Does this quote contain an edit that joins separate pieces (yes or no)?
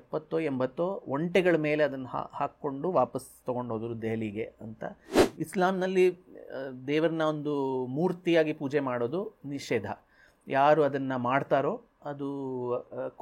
yes